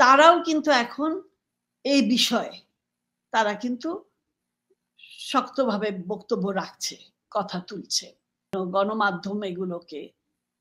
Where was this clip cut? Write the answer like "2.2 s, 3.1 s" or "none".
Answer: 8.5 s